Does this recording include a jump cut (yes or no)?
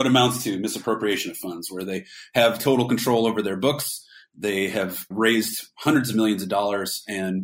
no